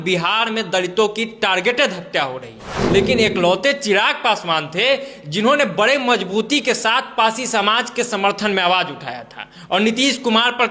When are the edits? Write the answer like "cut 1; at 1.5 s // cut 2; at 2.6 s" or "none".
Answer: cut 1; at 2.7 s